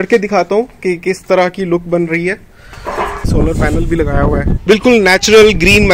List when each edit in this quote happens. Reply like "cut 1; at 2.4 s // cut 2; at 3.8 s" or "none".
cut 1; at 3.3 s // cut 2; at 4.6 s